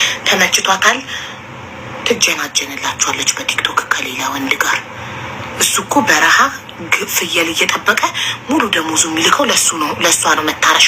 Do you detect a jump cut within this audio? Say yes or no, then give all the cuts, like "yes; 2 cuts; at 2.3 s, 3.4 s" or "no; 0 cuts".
no; 0 cuts